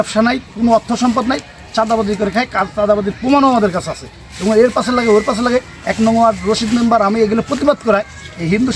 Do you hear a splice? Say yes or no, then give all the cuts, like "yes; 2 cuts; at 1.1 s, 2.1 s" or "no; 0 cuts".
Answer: no; 0 cuts